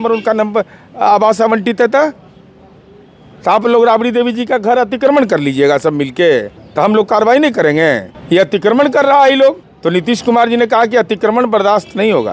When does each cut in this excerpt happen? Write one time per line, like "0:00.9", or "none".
0:06.6
0:08.1
0:09.7